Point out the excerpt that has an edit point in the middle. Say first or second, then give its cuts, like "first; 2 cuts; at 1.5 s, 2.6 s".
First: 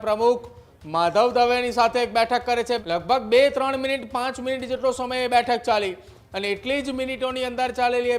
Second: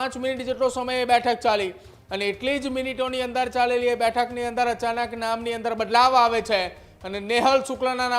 first; 1 cut; at 2.8 s